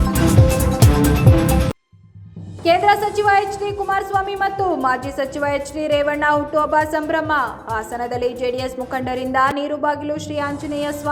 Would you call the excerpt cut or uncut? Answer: cut